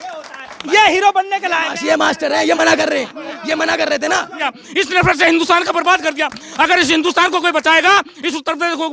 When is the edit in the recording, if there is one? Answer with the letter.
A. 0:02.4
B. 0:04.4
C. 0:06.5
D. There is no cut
B